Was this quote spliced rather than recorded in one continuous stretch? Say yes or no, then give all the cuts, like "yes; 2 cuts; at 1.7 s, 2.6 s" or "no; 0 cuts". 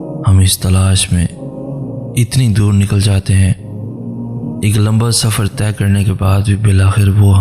no; 0 cuts